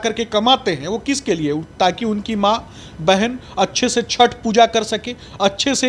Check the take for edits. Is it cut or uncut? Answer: uncut